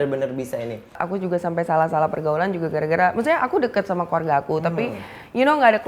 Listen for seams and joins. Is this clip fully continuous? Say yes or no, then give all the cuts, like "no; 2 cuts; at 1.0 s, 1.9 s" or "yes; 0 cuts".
no; 1 cut; at 1.0 s